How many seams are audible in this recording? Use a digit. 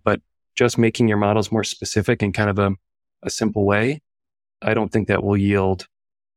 0